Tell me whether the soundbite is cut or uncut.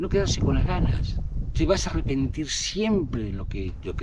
uncut